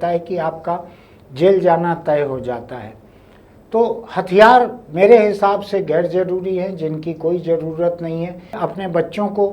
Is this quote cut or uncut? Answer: cut